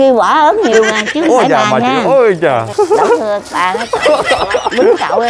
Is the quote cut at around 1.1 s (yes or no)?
no